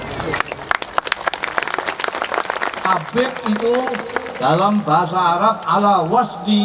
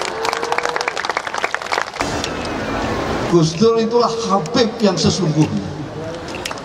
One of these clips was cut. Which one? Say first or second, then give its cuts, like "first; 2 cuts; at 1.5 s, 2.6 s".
second; 1 cut; at 2.0 s